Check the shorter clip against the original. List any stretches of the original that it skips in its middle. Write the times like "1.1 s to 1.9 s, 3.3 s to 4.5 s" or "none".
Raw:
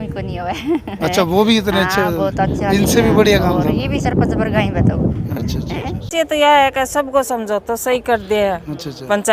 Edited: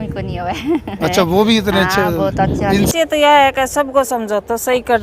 2.9 s to 6.1 s